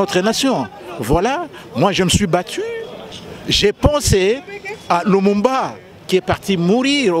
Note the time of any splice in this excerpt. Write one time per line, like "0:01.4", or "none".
0:03.0